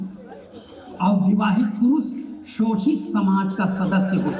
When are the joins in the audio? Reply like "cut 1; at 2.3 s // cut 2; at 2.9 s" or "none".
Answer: none